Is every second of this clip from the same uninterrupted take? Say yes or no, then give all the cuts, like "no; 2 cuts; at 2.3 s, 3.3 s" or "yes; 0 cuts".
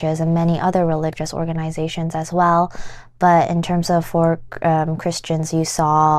yes; 0 cuts